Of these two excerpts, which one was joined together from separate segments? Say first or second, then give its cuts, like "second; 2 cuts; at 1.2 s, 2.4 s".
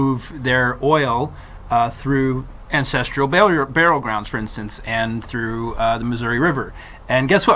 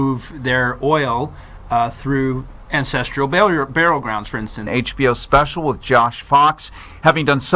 first; 1 cut; at 4.7 s